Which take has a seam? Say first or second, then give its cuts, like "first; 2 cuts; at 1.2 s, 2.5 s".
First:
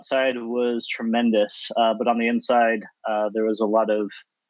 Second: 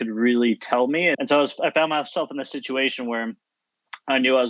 second; 1 cut; at 1.1 s